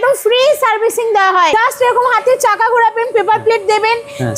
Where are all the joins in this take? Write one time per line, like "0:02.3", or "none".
0:01.5